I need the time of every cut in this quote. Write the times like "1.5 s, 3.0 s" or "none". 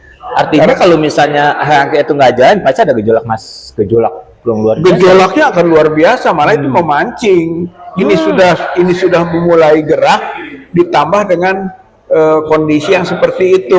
none